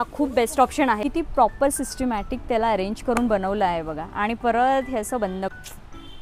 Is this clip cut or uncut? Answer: cut